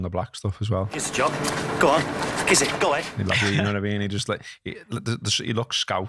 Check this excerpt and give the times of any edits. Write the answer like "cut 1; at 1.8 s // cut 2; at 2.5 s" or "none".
cut 1; at 1.0 s // cut 2; at 3.1 s